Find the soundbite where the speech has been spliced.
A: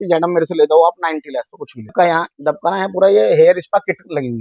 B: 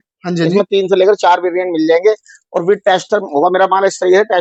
A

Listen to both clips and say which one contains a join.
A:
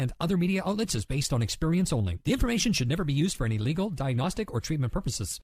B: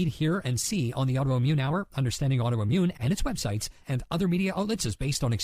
B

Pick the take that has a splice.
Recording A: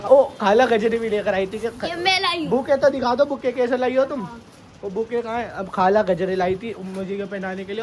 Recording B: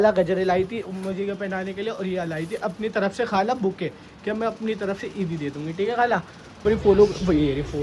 B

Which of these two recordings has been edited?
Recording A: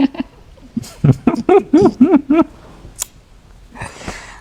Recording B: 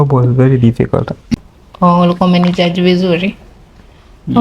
B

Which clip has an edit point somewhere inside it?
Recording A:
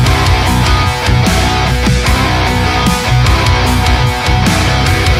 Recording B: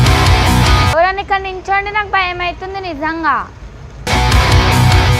B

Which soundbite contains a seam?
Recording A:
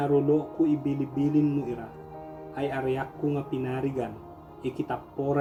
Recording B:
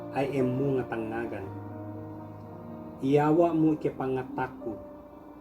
B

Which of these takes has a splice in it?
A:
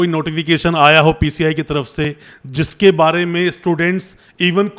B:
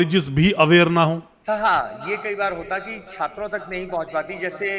B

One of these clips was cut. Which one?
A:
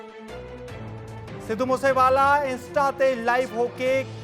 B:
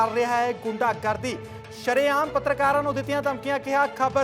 A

